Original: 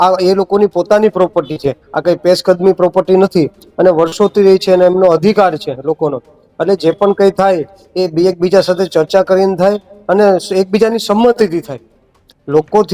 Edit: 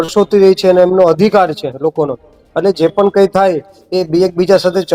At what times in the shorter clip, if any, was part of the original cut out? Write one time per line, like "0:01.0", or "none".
none